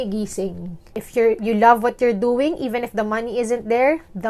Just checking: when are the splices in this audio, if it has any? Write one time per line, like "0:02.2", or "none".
0:01.0